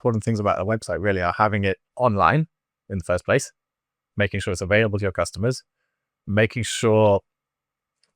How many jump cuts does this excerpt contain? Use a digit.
1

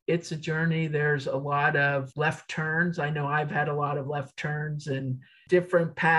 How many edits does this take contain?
1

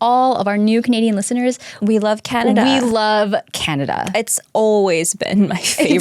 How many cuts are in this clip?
1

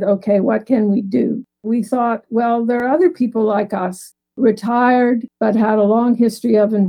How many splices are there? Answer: 1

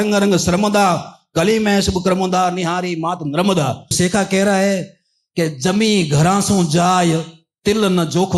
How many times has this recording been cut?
1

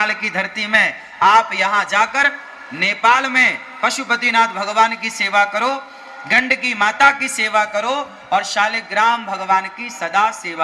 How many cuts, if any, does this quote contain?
0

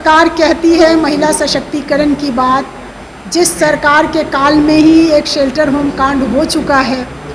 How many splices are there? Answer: 0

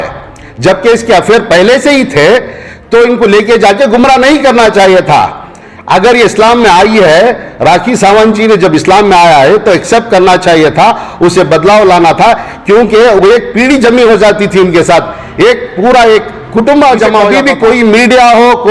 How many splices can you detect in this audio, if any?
1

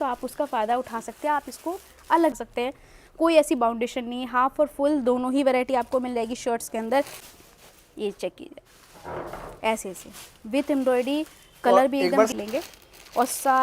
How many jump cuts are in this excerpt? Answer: 3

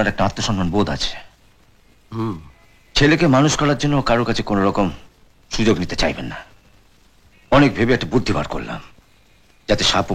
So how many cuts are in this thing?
0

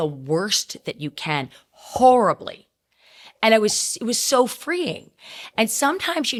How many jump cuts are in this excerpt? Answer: 0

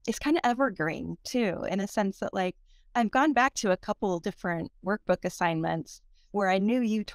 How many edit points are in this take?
0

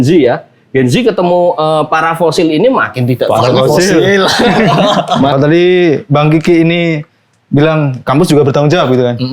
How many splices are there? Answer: 1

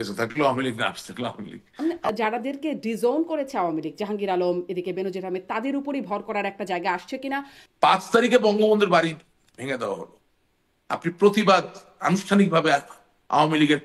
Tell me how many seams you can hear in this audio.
2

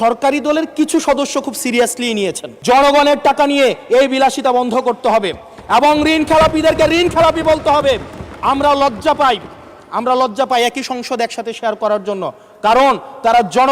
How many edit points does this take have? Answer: 1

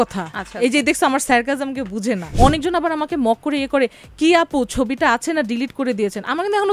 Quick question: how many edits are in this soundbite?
1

